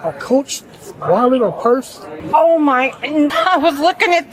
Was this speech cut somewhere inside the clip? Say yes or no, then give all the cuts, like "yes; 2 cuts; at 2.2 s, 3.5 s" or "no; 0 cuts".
yes; 2 cuts; at 2.1 s, 3.3 s